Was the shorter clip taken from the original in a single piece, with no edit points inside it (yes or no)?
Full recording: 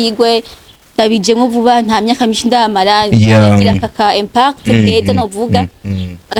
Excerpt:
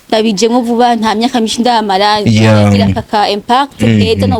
yes